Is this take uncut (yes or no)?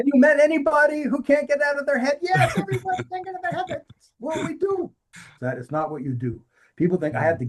no